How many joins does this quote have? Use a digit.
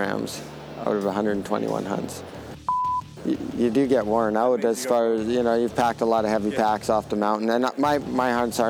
1